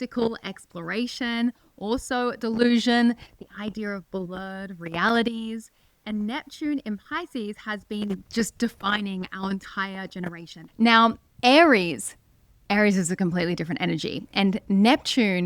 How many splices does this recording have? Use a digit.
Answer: 1